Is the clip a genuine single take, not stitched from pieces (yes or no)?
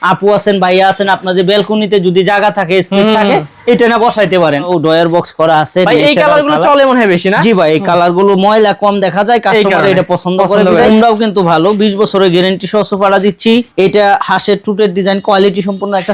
no